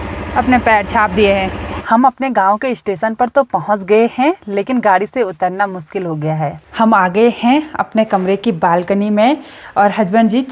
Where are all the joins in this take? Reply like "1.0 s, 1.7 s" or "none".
1.7 s, 6.6 s